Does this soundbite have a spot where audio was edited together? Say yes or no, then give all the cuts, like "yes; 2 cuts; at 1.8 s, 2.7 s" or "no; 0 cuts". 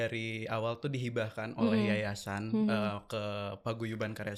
no; 0 cuts